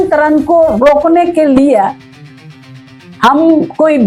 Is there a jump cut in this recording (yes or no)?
no